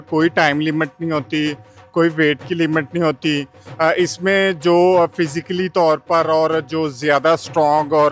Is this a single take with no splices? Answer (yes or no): yes